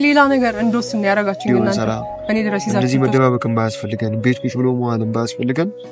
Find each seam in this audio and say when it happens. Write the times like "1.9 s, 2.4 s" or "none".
2.8 s